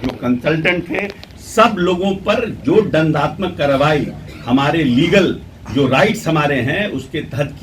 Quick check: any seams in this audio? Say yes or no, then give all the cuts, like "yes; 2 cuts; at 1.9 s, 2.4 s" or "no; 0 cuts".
no; 0 cuts